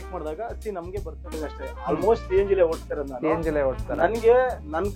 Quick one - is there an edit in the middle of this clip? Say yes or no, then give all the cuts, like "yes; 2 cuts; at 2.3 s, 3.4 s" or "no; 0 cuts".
yes; 1 cut; at 1.2 s